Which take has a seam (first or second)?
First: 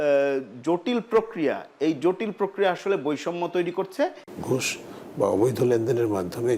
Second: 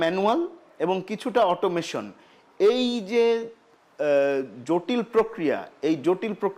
first